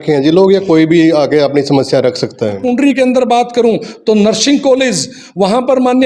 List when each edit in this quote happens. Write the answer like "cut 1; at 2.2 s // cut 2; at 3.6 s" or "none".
cut 1; at 2.6 s